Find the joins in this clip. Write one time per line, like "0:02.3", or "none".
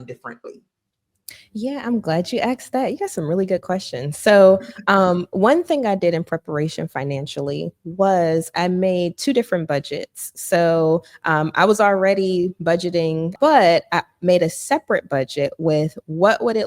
0:13.3